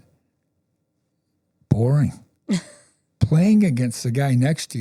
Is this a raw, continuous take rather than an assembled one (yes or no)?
yes